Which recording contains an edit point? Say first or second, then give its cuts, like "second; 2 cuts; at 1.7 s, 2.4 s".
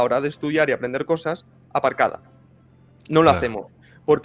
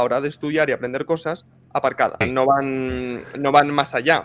second; 1 cut; at 2.2 s